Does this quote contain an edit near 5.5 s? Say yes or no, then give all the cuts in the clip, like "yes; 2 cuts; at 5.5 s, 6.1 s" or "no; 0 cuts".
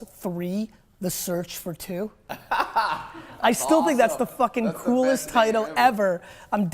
yes; 1 cut; at 5.5 s